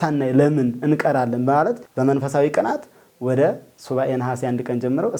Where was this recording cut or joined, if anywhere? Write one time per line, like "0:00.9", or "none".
none